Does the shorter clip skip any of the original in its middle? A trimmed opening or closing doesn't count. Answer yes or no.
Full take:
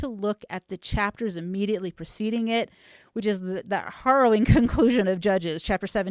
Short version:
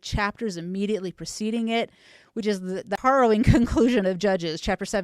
yes